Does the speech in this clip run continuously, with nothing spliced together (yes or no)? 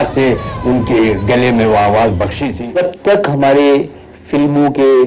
no